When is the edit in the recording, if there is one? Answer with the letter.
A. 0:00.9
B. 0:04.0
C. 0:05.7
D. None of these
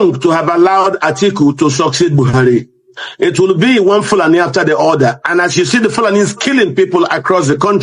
D